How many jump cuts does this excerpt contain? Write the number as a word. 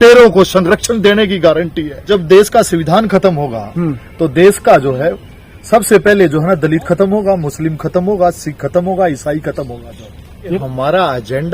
two